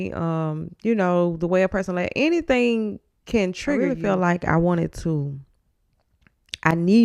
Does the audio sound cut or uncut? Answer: cut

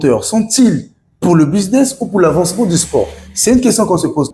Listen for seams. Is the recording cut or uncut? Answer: uncut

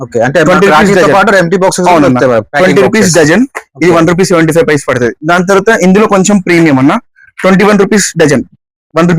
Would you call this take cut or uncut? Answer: cut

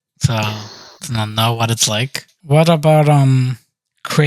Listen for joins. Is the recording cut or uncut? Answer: cut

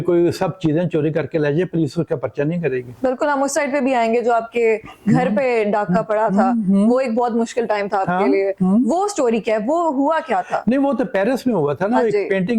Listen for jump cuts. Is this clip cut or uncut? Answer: uncut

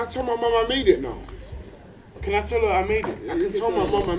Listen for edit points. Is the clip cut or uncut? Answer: uncut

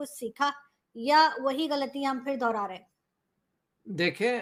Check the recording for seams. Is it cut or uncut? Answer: uncut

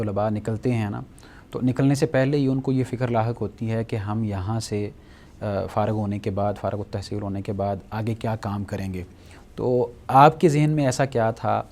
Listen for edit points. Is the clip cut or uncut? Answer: uncut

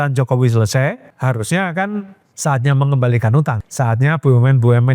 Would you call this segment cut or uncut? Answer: cut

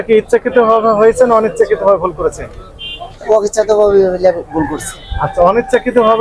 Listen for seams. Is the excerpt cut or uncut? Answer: uncut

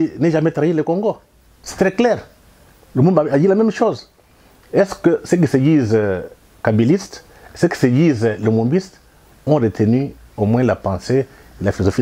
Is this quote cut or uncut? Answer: uncut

